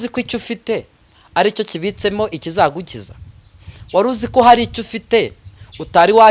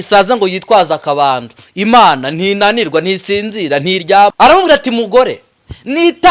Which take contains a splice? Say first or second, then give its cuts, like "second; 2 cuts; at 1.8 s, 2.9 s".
second; 1 cut; at 4.3 s